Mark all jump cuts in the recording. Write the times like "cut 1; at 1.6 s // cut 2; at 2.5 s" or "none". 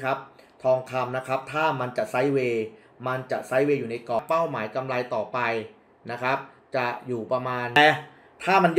cut 1; at 4.2 s // cut 2; at 7.8 s